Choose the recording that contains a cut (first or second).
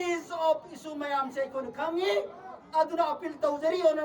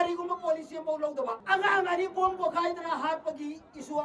second